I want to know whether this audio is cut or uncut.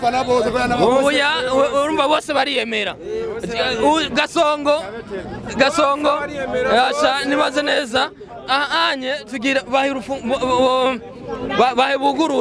uncut